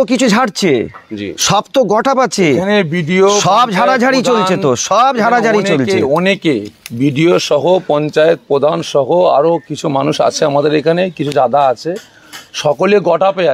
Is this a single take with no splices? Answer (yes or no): yes